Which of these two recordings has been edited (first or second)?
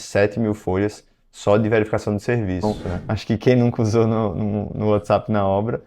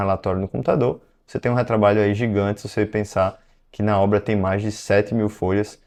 first